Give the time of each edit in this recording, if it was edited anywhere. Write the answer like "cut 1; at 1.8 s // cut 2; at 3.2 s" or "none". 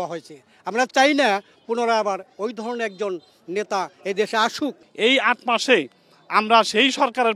cut 1; at 4.8 s